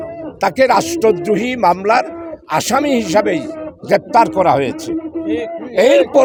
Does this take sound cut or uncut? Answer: uncut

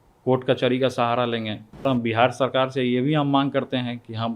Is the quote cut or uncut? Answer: cut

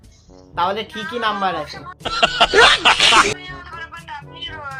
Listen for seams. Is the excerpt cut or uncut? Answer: uncut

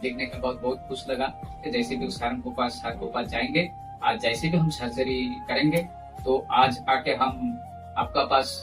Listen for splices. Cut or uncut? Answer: cut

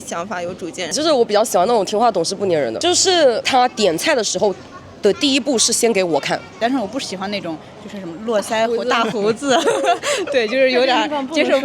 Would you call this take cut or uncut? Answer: cut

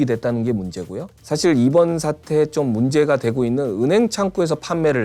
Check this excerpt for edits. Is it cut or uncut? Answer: uncut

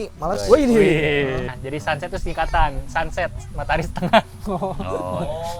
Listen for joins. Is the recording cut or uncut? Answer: cut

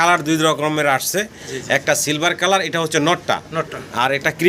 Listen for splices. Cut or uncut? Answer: uncut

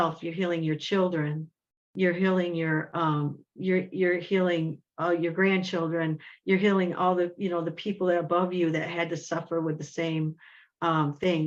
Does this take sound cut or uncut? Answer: uncut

